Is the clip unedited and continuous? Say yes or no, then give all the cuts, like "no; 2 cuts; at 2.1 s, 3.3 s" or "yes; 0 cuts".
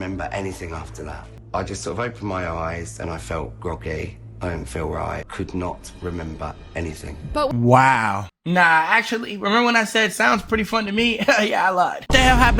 no; 3 cuts; at 1.3 s, 5.3 s, 8.3 s